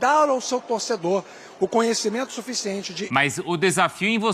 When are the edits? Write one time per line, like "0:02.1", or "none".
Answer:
0:03.0